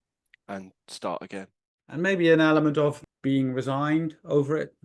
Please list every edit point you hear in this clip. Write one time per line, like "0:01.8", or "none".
0:02.0
0:03.1